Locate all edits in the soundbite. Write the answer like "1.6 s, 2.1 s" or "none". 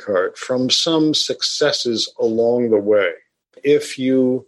3.6 s